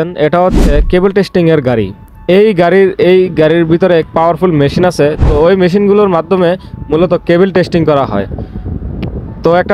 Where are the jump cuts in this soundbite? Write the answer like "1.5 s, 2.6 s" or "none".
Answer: 4.1 s